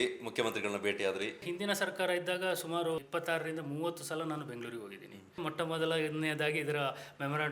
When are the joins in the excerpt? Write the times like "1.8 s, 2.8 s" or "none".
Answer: 1.4 s, 3.0 s, 5.4 s